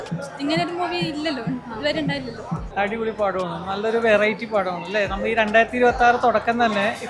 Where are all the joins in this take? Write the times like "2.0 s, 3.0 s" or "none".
2.7 s